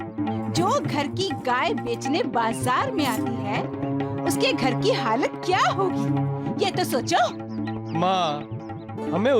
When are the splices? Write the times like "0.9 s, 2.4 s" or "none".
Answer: none